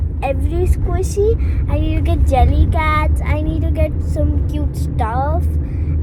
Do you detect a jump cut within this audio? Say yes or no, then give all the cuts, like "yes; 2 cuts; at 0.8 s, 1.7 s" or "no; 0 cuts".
no; 0 cuts